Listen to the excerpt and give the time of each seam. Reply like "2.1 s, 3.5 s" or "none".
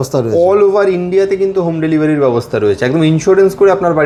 none